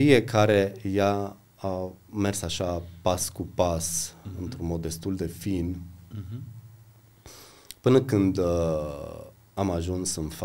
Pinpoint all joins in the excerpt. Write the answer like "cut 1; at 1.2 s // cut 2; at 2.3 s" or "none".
none

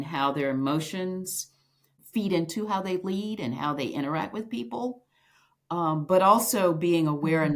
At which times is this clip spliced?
cut 1; at 2.0 s

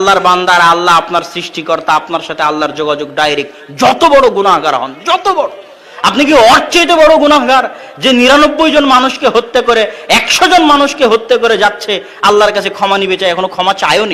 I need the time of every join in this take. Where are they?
none

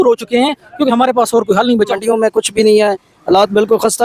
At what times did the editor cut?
cut 1; at 2.0 s

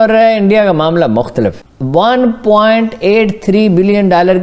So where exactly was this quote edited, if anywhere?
cut 1; at 1.6 s

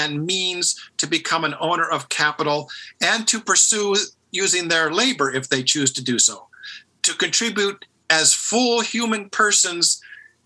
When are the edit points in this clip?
none

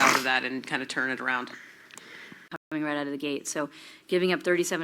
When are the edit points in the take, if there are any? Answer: cut 1; at 2.6 s

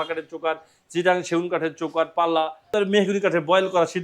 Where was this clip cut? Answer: cut 1; at 2.7 s

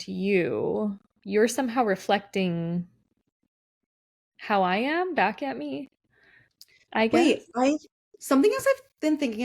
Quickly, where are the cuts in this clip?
cut 1; at 1.1 s

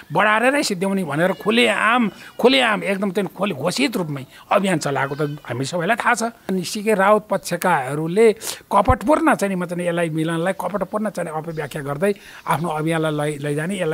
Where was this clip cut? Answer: cut 1; at 6.4 s

